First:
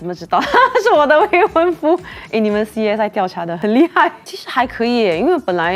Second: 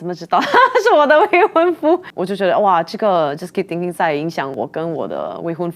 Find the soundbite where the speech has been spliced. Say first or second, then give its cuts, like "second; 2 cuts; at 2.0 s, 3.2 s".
second; 2 cuts; at 2.1 s, 4.5 s